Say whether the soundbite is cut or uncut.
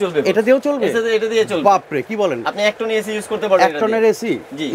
uncut